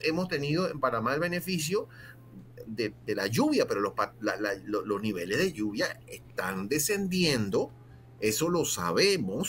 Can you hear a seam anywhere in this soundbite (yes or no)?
no